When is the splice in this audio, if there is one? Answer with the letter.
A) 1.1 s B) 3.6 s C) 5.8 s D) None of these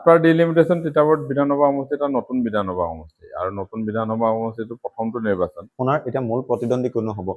C